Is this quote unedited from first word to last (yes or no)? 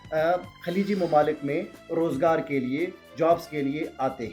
yes